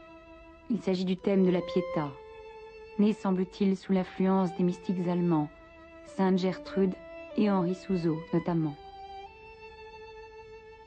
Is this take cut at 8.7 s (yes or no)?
yes